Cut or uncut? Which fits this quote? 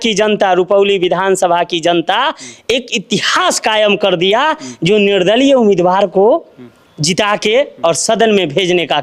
uncut